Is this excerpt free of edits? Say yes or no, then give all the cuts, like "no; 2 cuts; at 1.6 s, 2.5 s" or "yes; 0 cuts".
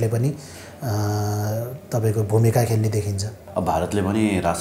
no; 1 cut; at 3.3 s